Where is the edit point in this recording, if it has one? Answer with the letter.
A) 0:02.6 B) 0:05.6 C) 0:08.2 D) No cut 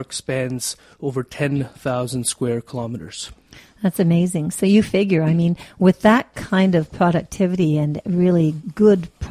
C